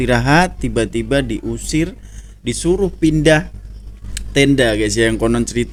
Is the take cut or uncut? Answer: uncut